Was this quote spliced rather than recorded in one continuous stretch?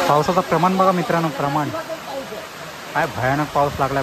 no; 0 cuts

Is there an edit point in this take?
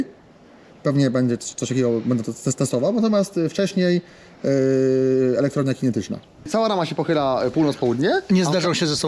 yes; 1 cut; at 6.5 s

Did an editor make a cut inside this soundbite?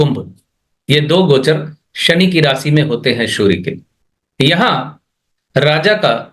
no; 0 cuts

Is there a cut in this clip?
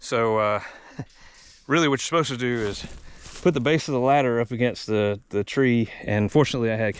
no; 0 cuts

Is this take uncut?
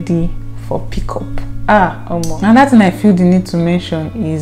no; 1 cut; at 2.3 s

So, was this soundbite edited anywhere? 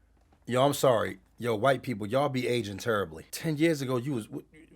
yes; 1 cut; at 3.2 s

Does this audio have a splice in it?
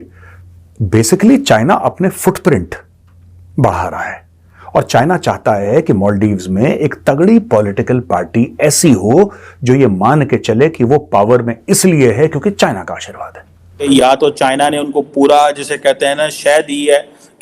yes; 1 cut; at 13.9 s

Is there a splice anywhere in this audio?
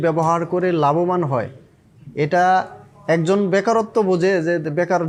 no; 0 cuts

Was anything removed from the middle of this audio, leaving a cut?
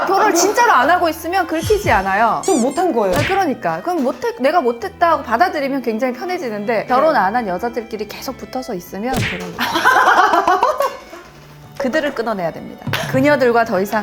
yes; 1 cut; at 6.9 s

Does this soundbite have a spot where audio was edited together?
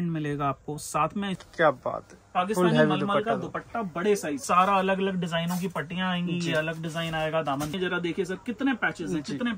yes; 3 cuts; at 1.4 s, 4.4 s, 7.7 s

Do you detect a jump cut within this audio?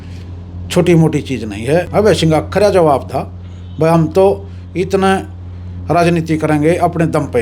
yes; 1 cut; at 1.9 s

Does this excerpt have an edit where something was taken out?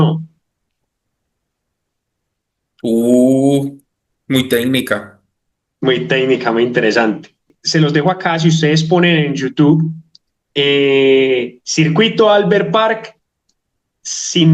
yes; 1 cut; at 7.6 s

